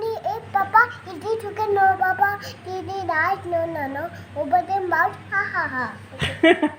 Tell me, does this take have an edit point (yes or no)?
no